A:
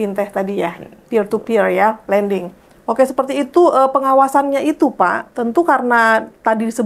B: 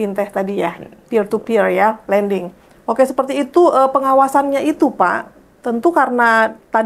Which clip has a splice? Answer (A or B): A